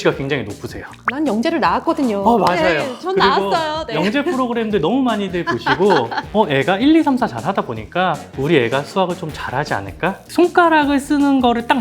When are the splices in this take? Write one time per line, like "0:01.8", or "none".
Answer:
0:10.2